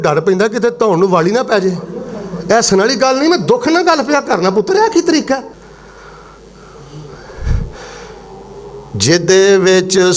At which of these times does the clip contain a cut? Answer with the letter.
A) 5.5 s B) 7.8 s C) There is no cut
A